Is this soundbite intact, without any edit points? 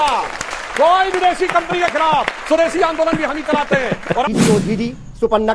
no; 1 cut; at 4.3 s

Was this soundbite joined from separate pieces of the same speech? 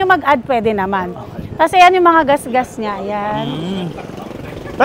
no; 0 cuts

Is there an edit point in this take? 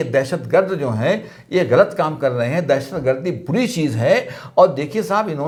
no; 0 cuts

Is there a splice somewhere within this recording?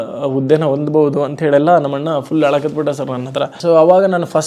yes; 1 cut; at 3.5 s

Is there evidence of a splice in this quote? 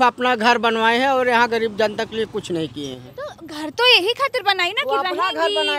no; 0 cuts

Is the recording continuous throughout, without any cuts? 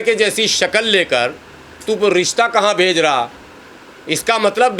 yes; 0 cuts

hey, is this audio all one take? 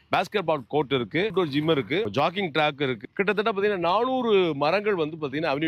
no; 1 cut; at 1.3 s

